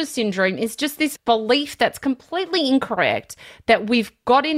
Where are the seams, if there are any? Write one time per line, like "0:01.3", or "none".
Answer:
0:01.1